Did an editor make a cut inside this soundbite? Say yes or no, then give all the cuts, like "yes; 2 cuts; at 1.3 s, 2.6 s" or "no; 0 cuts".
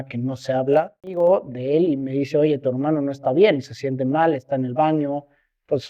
yes; 1 cut; at 1.1 s